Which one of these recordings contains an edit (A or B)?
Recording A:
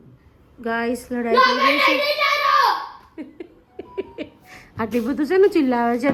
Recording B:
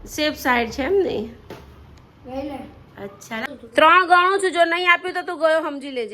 B